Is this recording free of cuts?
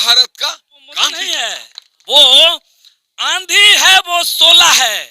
no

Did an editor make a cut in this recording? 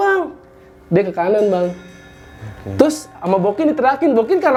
no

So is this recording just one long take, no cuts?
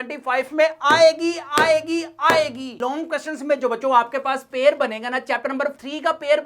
no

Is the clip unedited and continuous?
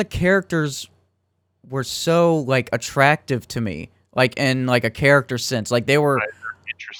yes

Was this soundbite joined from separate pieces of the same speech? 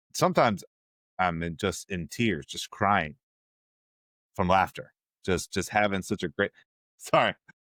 no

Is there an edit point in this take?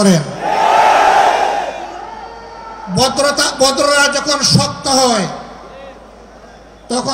no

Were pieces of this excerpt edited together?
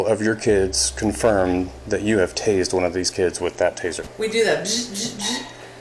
yes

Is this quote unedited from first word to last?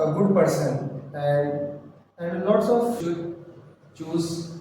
no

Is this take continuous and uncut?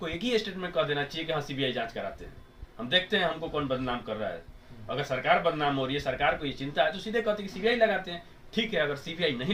yes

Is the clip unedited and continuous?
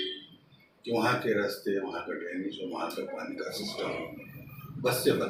yes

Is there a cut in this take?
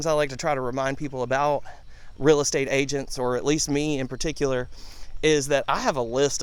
no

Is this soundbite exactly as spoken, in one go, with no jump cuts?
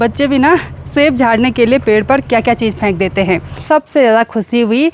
no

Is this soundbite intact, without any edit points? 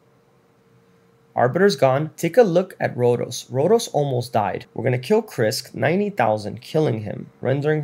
no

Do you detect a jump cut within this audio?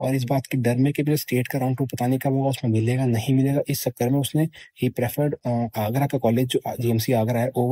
no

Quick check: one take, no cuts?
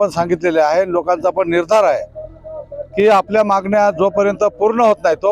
yes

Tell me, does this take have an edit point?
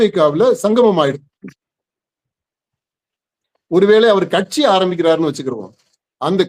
no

